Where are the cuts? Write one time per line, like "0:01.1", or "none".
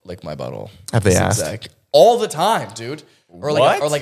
none